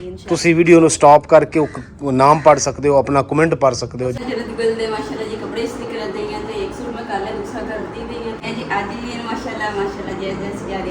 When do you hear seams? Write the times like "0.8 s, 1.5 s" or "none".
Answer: 4.2 s, 8.4 s